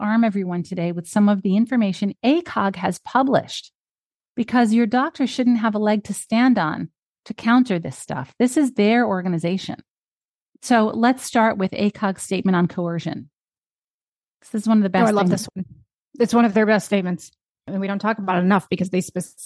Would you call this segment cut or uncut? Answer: uncut